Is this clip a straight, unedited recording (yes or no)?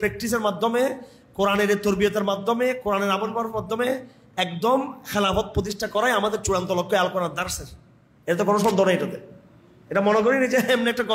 yes